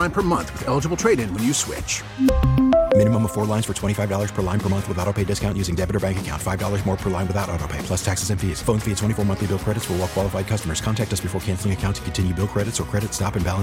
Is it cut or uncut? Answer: uncut